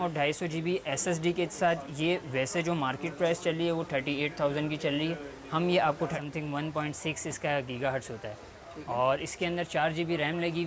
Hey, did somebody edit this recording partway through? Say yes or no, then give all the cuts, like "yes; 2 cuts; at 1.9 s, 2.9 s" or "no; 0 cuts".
yes; 1 cut; at 6.2 s